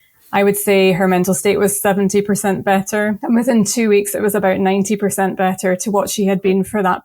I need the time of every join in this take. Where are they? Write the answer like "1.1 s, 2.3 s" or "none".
3.2 s